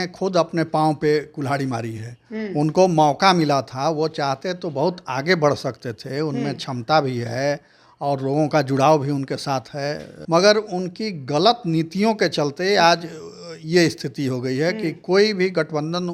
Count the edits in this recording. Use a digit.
1